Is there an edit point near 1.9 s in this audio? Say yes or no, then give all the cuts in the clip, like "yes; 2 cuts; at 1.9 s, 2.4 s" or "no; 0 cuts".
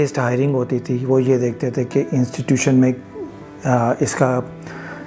no; 0 cuts